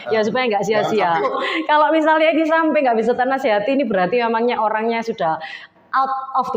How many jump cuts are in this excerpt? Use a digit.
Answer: 1